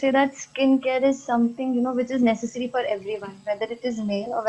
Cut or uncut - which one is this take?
uncut